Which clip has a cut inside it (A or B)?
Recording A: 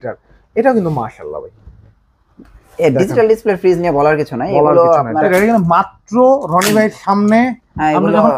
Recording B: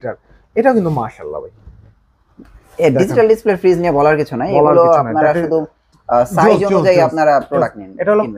A